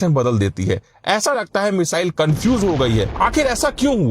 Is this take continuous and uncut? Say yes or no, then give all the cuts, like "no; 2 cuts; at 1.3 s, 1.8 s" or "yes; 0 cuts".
no; 1 cut; at 3.1 s